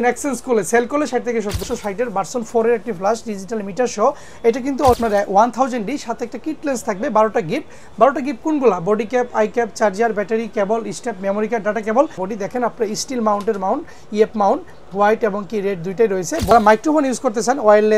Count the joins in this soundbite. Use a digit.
4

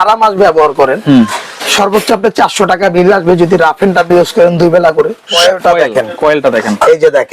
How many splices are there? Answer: 1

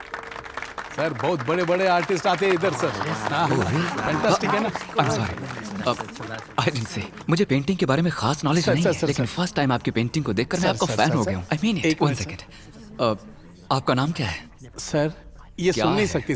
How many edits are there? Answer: 0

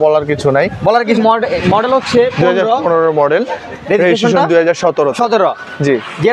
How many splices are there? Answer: 1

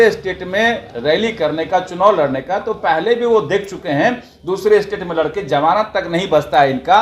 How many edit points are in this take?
0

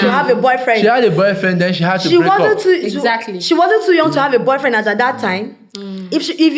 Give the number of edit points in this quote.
0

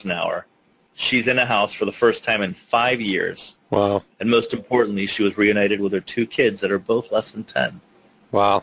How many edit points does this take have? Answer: 0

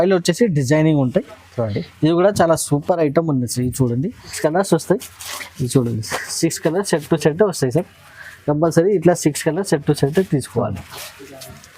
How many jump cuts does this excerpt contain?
1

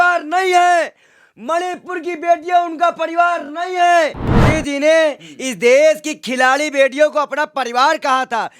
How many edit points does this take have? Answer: 1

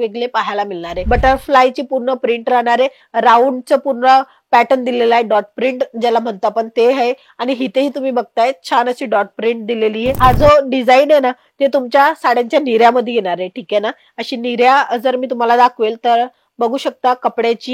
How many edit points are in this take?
2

